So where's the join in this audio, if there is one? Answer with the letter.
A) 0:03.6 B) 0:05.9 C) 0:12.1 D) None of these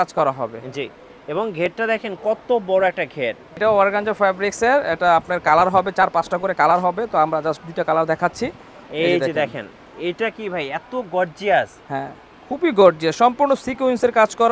A